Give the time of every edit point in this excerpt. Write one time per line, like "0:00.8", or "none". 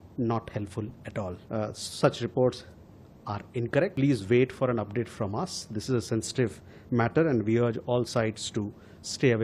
0:01.4
0:03.9